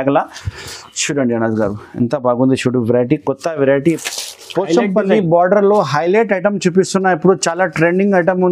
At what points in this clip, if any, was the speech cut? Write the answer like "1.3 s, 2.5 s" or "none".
4.0 s